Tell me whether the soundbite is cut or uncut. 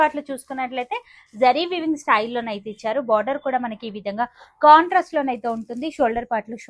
uncut